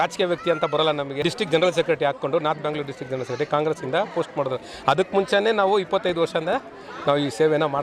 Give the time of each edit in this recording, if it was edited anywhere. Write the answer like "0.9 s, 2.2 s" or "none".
1.1 s